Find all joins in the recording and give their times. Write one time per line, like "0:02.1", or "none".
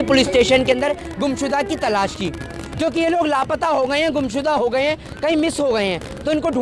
none